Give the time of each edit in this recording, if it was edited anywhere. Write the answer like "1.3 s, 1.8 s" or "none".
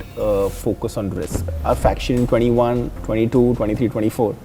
1.5 s